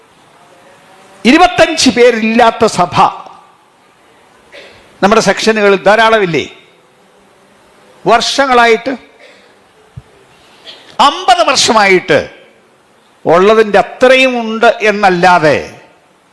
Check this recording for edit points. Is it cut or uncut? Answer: uncut